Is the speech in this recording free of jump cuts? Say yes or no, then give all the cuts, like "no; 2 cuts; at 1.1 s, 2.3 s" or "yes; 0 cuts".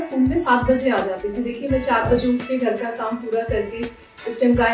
yes; 0 cuts